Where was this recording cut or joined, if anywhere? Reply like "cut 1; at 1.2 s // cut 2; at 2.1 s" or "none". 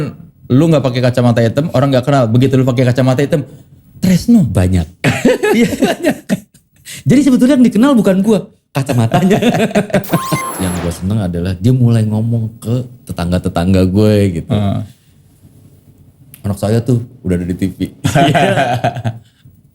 cut 1; at 10.4 s